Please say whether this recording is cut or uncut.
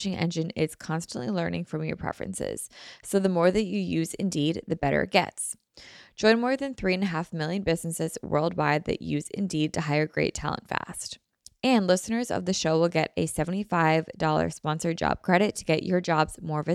uncut